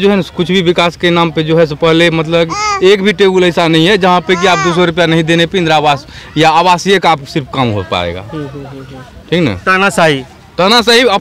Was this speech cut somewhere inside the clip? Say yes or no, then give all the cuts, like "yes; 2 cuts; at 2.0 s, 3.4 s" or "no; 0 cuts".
no; 0 cuts